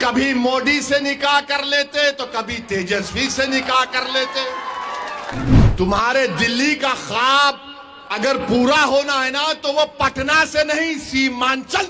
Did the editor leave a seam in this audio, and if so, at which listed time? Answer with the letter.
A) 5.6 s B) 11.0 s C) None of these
A